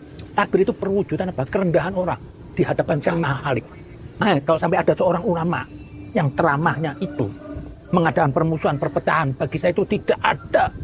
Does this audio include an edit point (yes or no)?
yes